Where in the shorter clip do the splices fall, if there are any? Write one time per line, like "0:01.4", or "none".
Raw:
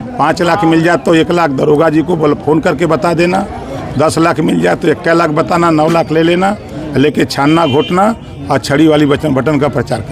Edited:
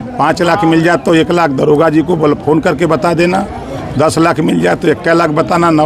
none